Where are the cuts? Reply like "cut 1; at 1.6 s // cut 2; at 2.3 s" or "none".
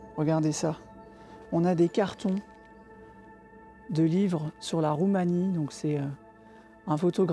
none

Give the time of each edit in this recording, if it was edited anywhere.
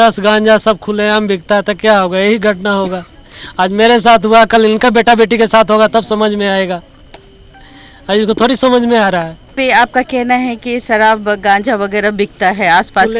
none

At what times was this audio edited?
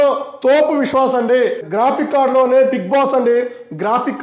cut 1; at 1.6 s

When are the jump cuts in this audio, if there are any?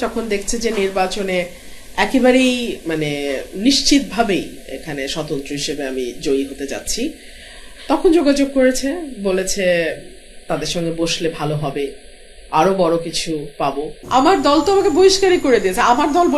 cut 1; at 14.0 s

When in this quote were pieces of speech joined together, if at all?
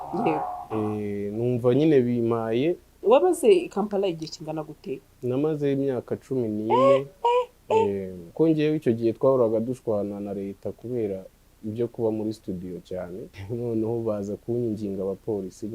cut 1; at 2.9 s // cut 2; at 8.2 s // cut 3; at 13.4 s

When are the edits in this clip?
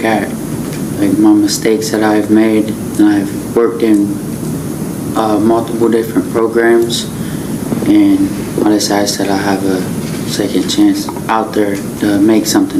none

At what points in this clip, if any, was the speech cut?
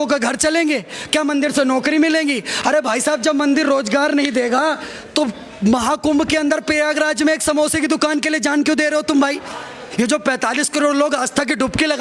cut 1; at 9.8 s

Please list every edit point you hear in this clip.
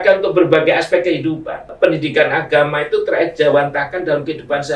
cut 1; at 1.7 s

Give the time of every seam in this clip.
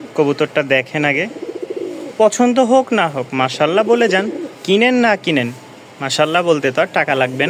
none

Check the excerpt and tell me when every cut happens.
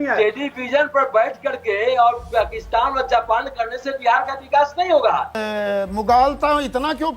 cut 1; at 5.4 s

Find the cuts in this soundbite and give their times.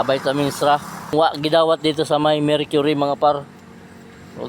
cut 1; at 1.1 s

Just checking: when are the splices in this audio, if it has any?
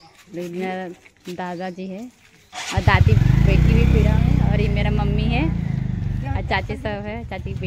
none

